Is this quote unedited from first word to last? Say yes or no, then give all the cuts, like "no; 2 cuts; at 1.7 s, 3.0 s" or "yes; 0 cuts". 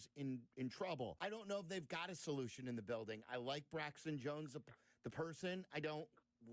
no; 1 cut; at 1.2 s